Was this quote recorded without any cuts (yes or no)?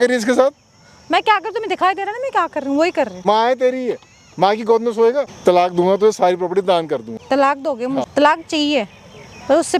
no